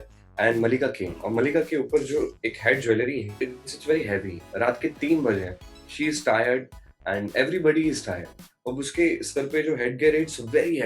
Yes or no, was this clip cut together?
yes